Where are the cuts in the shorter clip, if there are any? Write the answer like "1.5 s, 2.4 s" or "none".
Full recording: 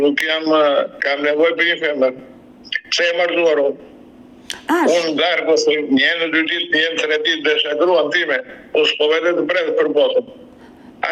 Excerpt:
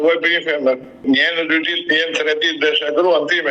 1.0 s